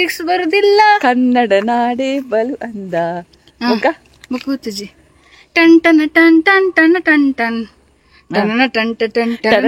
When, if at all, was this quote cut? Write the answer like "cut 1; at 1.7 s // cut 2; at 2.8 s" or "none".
none

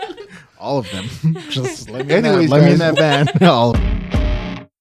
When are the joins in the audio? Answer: cut 1; at 3.7 s

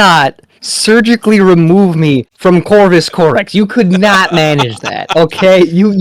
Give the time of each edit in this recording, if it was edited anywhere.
cut 1; at 2.3 s

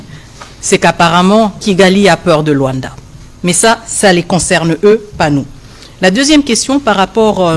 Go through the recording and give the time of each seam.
none

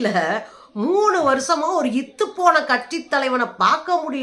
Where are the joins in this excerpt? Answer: none

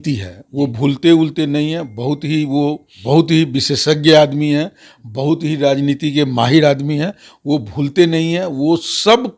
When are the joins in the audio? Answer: cut 1; at 2.9 s

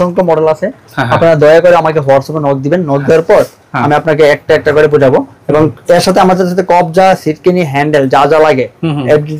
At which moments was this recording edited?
none

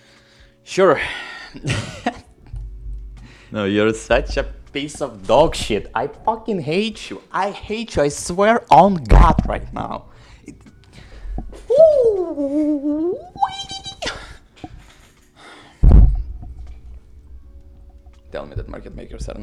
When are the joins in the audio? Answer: none

